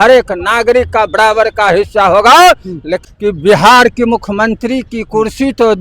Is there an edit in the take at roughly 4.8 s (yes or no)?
no